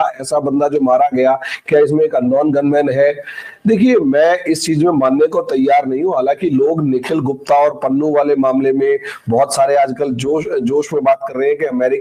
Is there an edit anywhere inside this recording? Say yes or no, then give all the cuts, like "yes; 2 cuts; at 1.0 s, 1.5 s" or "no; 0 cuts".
no; 0 cuts